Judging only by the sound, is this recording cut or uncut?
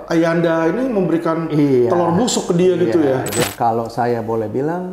cut